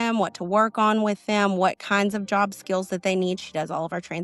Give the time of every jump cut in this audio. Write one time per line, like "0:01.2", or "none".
none